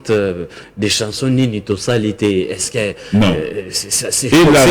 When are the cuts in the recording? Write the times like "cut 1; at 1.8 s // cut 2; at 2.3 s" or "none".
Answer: none